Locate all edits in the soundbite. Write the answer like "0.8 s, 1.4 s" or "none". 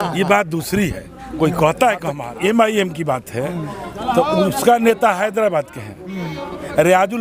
2.3 s